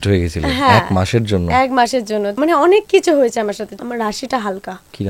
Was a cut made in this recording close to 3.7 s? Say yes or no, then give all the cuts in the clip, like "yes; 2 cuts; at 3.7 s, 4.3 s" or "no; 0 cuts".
yes; 2 cuts; at 2.4 s, 3.7 s